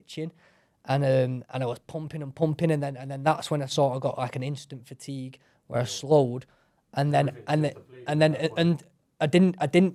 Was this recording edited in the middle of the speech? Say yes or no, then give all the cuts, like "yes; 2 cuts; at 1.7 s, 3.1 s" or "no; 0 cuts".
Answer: no; 0 cuts